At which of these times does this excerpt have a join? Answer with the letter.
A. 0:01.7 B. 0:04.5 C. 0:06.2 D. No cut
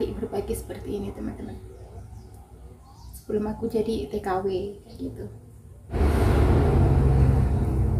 C